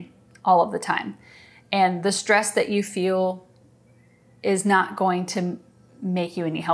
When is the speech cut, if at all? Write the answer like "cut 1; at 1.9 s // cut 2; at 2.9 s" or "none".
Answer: none